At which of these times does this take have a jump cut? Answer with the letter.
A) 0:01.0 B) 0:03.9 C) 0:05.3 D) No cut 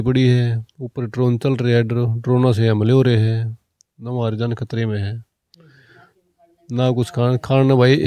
D